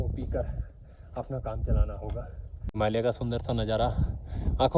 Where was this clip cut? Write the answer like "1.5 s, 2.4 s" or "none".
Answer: 2.6 s